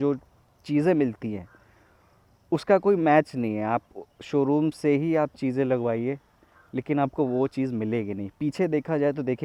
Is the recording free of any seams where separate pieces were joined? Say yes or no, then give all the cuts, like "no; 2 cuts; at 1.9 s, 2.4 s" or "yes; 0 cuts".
yes; 0 cuts